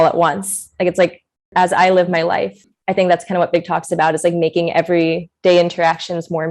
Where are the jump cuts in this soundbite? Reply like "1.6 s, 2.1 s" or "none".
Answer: 2.7 s